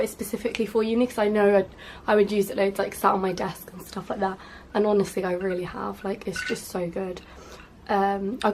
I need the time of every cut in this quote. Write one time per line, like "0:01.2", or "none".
0:02.9